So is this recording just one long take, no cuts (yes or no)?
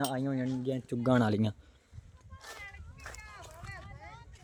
yes